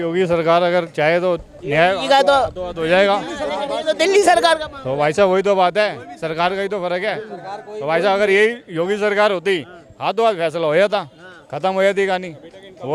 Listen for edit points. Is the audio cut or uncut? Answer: uncut